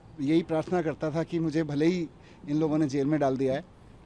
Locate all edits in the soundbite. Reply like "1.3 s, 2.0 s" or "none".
none

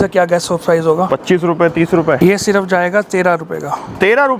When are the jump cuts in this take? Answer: 1.1 s, 2.2 s

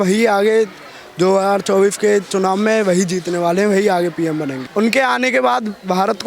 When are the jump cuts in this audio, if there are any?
4.6 s

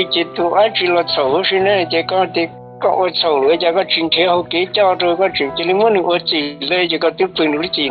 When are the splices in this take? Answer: 2.6 s

